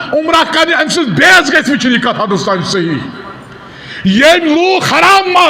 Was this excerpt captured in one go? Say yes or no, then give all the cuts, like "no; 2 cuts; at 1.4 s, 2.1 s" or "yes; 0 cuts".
yes; 0 cuts